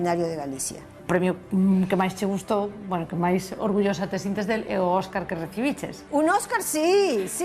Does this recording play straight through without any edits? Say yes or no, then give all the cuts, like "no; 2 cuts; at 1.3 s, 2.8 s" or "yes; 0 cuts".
no; 2 cuts; at 1.0 s, 5.9 s